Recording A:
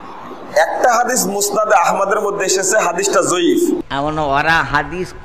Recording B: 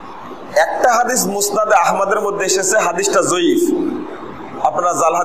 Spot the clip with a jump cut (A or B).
A